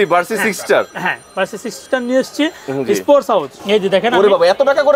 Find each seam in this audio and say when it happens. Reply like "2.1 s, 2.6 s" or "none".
3.6 s